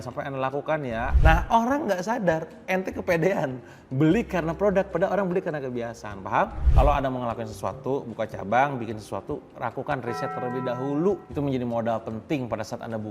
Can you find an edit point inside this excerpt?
yes; 2 cuts; at 1.1 s, 6.6 s

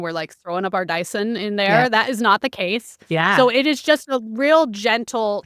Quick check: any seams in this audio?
no; 0 cuts

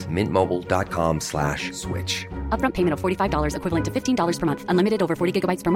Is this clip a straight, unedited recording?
yes; 0 cuts

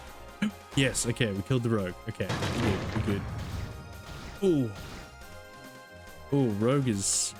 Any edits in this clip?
no; 0 cuts

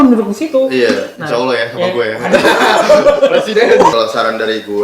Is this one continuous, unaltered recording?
no; 1 cut; at 3.9 s

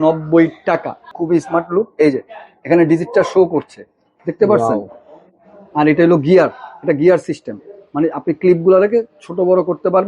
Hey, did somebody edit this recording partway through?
yes; 1 cut; at 1.1 s

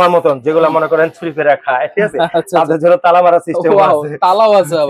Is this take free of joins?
yes; 0 cuts

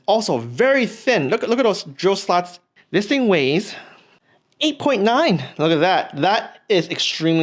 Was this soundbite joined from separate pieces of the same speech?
yes; 1 cut; at 2.7 s

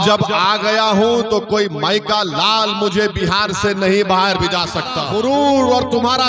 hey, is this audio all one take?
no; 1 cut; at 5.3 s

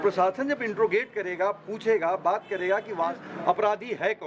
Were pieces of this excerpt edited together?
yes; 1 cut; at 3.3 s

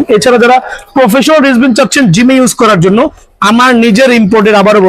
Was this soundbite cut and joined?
no; 0 cuts

